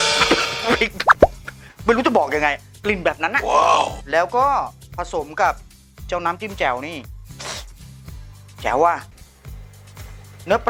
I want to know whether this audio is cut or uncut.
uncut